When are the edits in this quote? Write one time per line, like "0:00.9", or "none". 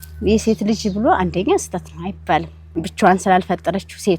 0:02.6

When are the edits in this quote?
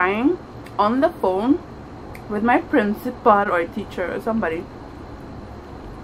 none

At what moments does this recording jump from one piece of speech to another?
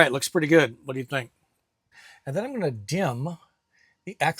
0:01.8

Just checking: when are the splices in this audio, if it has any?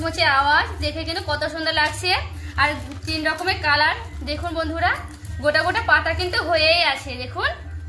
none

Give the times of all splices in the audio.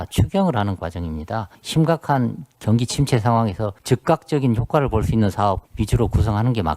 0:01.6
0:03.7
0:05.7

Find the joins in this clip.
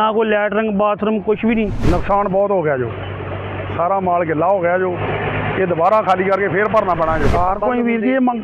0:01.8
0:07.3

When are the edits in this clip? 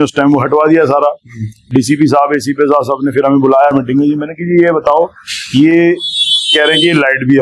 none

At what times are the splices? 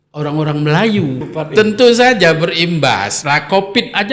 0:01.3

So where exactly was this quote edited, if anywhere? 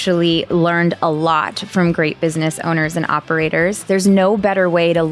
0:03.8

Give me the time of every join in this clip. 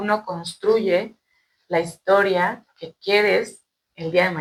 none

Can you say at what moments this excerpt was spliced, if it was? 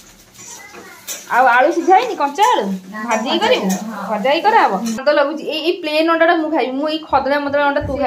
0:05.0

